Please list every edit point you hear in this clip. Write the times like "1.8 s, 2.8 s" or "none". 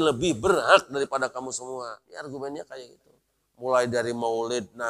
2.0 s